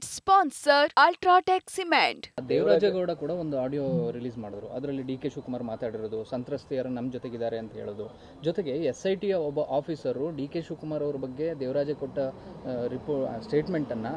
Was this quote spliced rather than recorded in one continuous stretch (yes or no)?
yes